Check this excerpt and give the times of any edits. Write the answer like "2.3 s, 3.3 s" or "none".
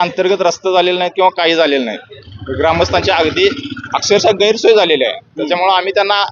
none